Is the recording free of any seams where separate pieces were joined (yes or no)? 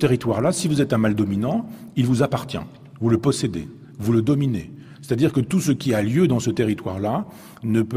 no